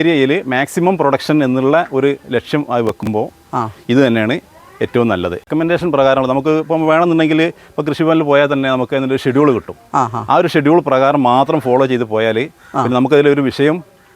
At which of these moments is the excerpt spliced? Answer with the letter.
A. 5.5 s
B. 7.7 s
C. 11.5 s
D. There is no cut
A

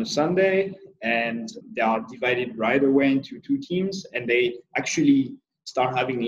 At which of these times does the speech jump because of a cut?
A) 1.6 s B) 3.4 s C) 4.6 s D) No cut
A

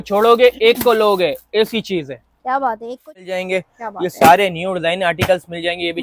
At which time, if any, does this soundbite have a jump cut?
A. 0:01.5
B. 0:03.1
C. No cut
B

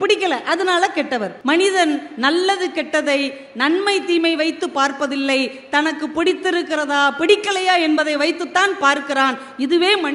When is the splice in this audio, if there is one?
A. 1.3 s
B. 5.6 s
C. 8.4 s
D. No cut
A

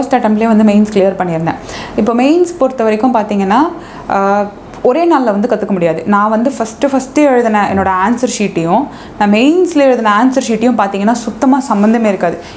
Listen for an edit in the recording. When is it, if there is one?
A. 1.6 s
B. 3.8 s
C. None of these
C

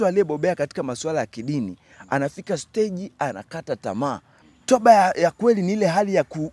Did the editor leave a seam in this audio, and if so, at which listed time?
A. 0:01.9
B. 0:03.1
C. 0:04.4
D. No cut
C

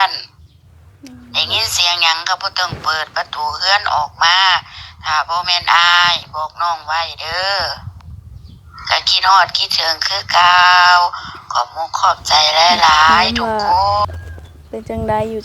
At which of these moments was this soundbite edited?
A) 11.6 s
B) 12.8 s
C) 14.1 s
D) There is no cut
C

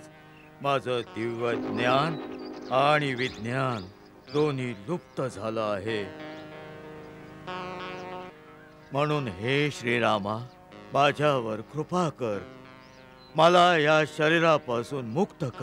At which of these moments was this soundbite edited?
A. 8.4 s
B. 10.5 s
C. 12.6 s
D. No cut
A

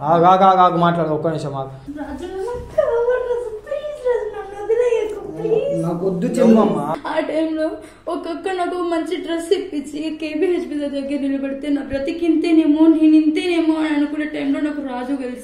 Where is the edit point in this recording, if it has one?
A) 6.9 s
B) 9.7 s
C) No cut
A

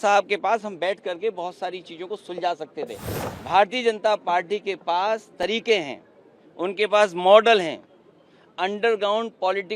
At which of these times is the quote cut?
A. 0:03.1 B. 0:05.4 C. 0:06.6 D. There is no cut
A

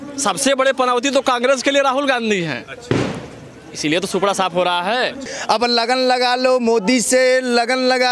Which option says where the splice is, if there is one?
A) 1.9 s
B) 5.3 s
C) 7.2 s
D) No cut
B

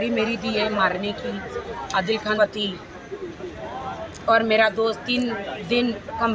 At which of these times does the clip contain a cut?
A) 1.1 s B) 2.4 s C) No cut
B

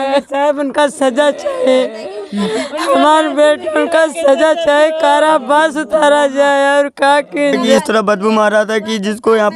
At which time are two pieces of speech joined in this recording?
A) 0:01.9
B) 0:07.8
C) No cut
B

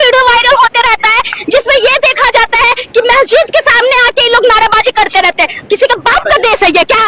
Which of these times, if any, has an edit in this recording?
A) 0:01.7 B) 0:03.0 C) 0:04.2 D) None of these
D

